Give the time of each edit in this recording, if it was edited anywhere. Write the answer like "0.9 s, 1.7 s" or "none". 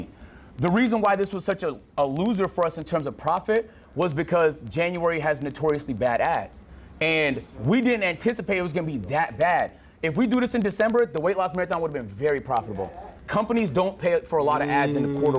none